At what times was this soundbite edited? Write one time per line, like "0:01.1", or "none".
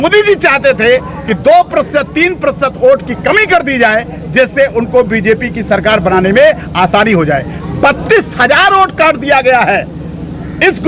none